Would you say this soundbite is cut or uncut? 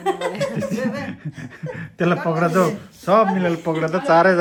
uncut